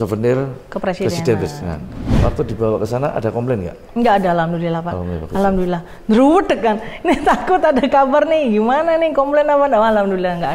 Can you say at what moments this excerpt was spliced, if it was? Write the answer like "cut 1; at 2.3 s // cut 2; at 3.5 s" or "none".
cut 1; at 2.0 s

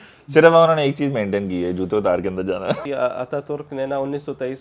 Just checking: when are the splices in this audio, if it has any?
cut 1; at 2.9 s

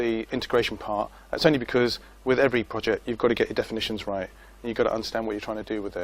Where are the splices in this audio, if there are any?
cut 1; at 3.6 s

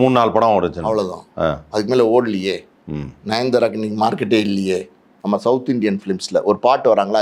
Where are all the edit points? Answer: cut 1; at 5.1 s

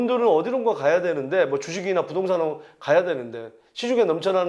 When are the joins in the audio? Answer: none

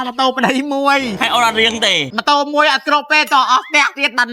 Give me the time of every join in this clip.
cut 1; at 1.2 s // cut 2; at 2.1 s

